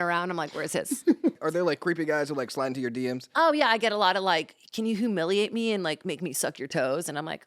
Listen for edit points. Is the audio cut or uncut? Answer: cut